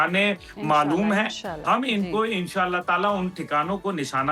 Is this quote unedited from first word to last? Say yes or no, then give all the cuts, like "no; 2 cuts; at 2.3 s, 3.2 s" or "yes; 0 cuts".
yes; 0 cuts